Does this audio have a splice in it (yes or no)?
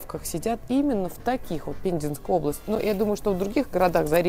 no